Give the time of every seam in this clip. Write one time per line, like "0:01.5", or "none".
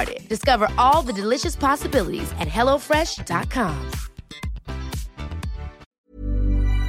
0:06.0